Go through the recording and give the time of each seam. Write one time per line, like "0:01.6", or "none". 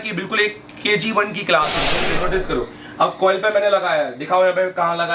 0:02.0